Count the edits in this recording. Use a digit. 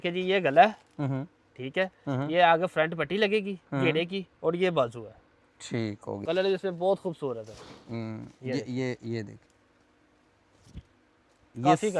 1